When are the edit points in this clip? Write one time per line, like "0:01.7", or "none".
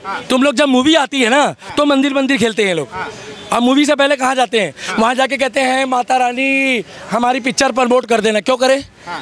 none